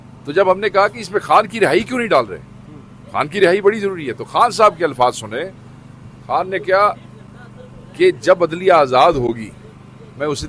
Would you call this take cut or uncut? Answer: uncut